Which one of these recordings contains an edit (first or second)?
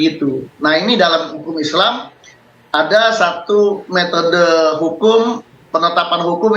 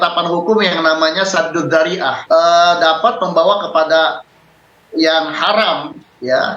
second